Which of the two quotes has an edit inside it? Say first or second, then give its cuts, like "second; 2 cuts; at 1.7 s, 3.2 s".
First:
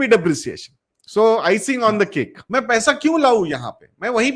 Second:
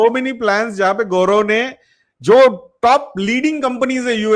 first; 1 cut; at 2.4 s